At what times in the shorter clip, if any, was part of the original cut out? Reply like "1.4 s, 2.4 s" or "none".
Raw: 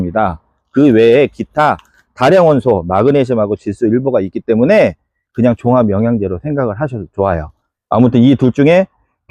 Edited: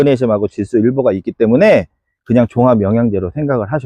none